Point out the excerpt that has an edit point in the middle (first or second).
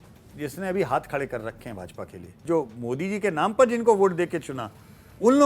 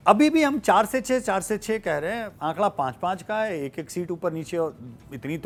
first